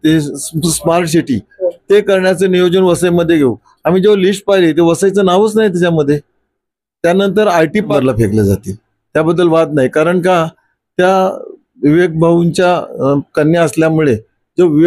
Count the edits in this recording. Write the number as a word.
one